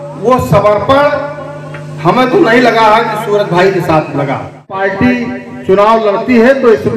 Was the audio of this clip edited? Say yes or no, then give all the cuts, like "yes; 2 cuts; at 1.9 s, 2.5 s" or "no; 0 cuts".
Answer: yes; 1 cut; at 4.8 s